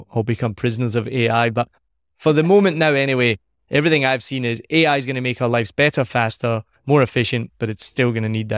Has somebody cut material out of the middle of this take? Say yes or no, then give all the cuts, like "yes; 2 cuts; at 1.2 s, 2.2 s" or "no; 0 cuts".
no; 0 cuts